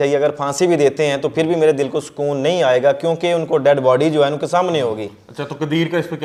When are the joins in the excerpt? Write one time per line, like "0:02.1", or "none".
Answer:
none